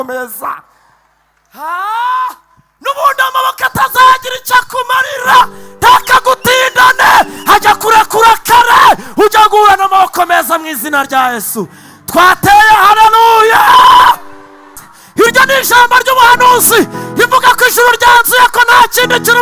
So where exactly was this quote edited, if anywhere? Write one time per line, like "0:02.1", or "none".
0:14.9